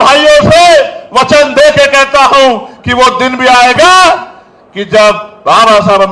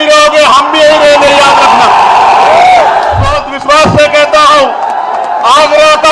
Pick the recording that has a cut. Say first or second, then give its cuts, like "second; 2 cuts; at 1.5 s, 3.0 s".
second; 1 cut; at 3.4 s